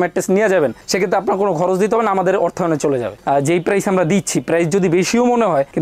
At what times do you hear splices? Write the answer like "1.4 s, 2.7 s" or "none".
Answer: none

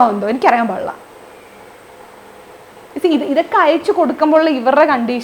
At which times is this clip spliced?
none

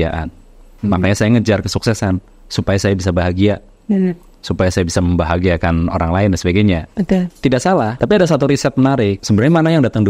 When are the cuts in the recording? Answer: 7.9 s, 9.2 s

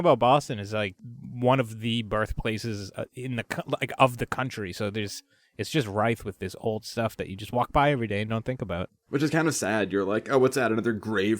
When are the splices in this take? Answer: 0.9 s, 8.9 s

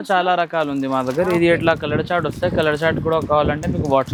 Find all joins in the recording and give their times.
none

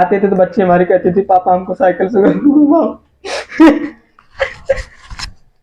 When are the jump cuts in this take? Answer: none

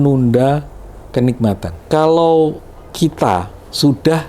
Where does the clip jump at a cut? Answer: 1.7 s

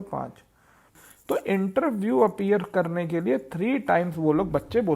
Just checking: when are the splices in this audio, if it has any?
0.9 s

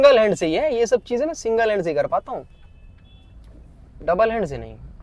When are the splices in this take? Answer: none

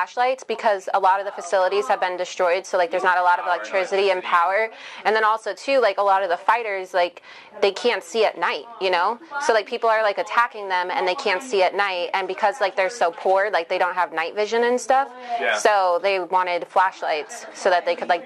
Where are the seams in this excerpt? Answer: none

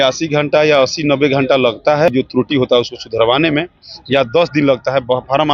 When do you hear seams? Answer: 2.1 s

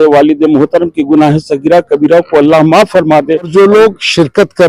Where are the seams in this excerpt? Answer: 3.5 s

